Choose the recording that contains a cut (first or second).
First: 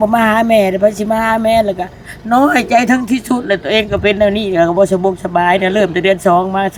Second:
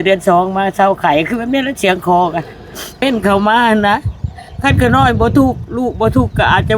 second